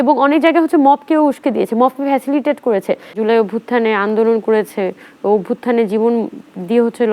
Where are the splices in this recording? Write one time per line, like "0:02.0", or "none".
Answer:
0:03.2